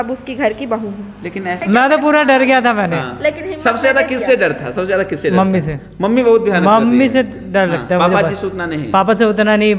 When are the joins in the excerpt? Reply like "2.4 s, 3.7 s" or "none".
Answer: 1.6 s